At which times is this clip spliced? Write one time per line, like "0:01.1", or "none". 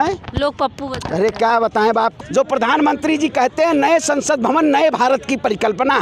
0:02.1

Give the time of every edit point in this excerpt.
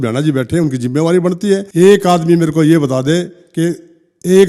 0:01.7

